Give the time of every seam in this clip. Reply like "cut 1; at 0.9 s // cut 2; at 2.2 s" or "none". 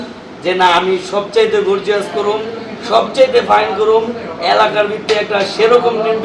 none